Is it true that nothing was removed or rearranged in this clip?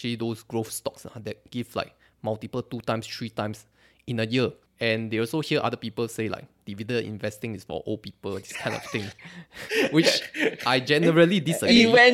no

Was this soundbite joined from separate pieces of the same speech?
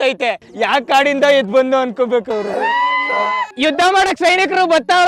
yes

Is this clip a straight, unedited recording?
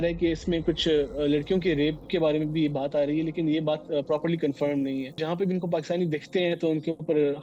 no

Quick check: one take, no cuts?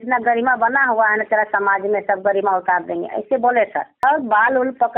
no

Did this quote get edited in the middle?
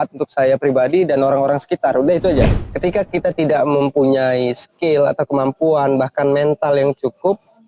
yes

